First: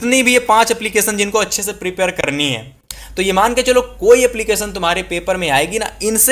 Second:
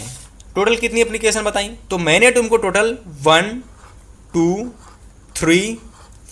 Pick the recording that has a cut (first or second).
first